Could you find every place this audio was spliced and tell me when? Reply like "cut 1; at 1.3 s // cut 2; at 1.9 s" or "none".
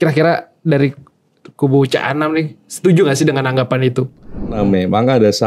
cut 1; at 4.6 s